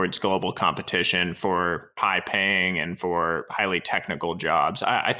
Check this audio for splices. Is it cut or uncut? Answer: cut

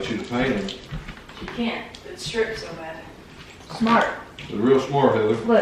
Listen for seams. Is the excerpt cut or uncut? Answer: uncut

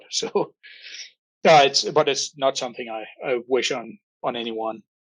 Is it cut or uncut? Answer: cut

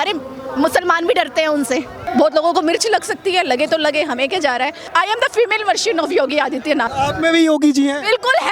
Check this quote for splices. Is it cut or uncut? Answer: cut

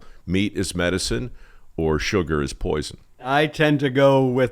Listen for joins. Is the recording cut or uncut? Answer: cut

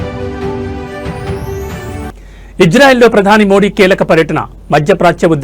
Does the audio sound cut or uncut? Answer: cut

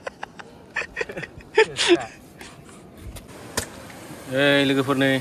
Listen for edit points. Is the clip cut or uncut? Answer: cut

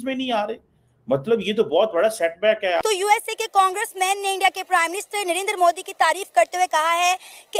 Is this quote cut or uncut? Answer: cut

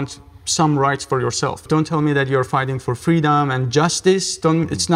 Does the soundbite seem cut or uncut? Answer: cut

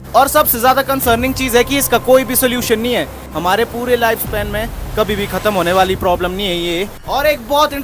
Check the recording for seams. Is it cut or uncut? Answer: cut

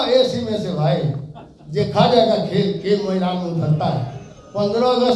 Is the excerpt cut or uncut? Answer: uncut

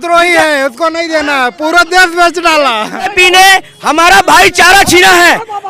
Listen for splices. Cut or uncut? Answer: cut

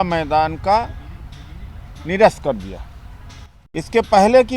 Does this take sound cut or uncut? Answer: uncut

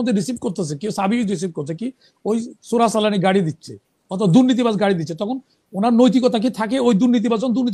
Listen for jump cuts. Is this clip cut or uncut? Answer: uncut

